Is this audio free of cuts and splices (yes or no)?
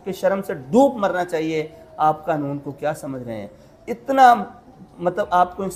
yes